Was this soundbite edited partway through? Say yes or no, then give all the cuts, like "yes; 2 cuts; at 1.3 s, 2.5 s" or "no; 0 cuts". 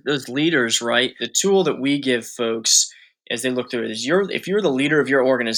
yes; 1 cut; at 1.3 s